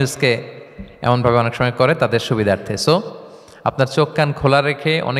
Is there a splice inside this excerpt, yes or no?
no